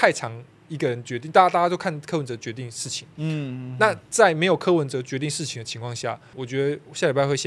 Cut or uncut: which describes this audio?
cut